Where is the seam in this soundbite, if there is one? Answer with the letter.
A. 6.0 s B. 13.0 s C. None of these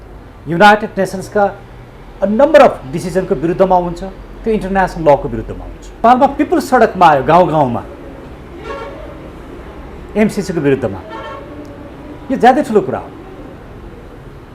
A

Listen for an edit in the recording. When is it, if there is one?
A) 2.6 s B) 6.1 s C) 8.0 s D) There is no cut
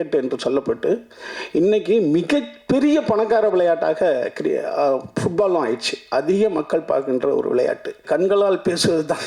C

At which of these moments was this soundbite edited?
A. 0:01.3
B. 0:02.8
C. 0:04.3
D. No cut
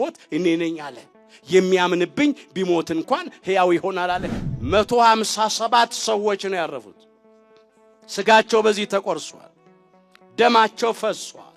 C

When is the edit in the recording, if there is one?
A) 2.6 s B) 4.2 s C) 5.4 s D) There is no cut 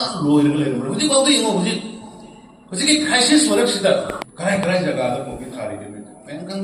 B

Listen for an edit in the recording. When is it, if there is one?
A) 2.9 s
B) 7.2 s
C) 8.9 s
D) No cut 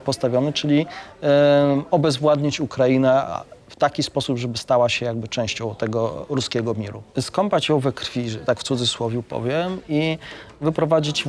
B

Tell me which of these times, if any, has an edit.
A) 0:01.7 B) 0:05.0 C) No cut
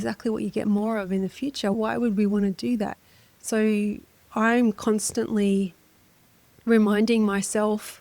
A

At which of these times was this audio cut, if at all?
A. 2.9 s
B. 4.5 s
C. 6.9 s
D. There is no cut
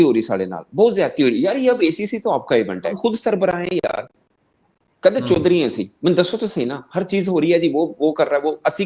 A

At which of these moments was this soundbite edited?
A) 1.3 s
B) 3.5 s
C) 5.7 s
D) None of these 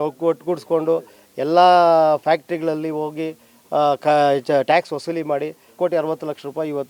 C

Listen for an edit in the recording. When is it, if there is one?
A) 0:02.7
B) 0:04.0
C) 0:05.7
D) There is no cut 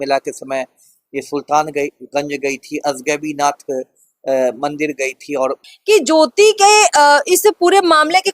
C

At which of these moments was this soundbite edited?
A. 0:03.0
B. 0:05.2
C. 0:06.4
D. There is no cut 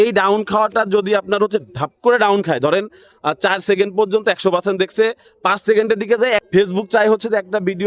C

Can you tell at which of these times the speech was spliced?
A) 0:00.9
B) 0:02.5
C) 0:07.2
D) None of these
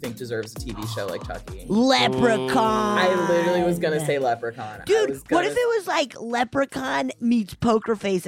C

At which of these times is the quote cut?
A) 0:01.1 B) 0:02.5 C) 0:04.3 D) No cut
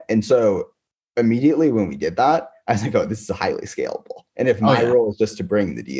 D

